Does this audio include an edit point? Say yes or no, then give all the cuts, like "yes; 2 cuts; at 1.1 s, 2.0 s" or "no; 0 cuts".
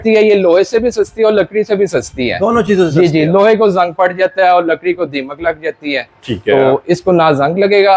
no; 0 cuts